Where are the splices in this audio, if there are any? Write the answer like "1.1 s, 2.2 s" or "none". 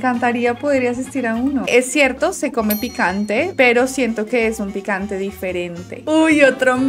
1.7 s, 6.0 s